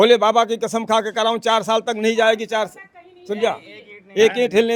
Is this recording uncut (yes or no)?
yes